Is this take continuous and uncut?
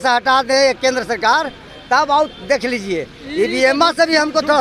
yes; 0 cuts

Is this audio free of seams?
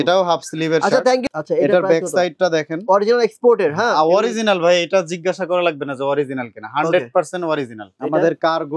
no; 2 cuts; at 1.3 s, 7.9 s

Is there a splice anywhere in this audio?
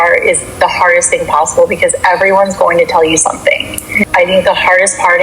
no; 0 cuts

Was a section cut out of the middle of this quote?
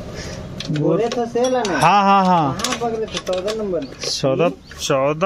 yes; 1 cut; at 3.9 s

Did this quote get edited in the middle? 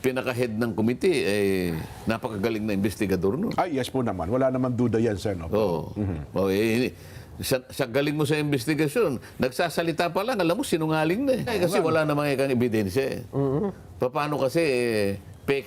yes; 1 cut; at 11.5 s

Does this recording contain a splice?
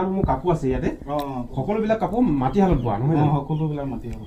no; 0 cuts

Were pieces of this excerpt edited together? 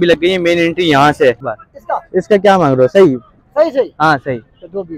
yes; 1 cut; at 1.5 s

